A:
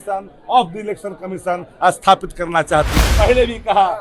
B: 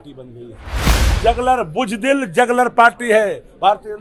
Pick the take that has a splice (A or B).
A